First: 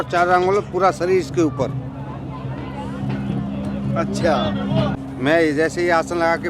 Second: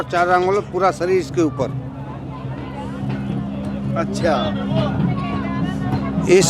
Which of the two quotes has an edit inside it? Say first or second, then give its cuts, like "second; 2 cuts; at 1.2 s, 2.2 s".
first; 1 cut; at 5.0 s